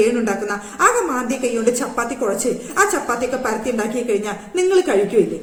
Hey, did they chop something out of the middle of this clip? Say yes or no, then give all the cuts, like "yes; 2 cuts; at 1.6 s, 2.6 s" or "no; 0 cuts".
no; 0 cuts